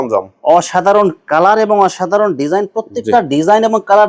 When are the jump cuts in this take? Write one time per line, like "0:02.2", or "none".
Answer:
none